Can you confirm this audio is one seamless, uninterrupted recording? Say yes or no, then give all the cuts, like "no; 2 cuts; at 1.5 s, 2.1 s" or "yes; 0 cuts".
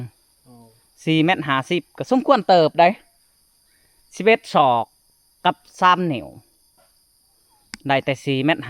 yes; 0 cuts